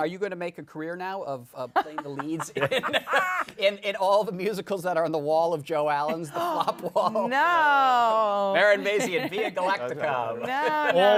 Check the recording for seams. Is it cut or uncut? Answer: uncut